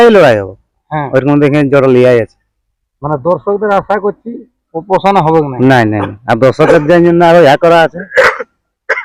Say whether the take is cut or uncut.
uncut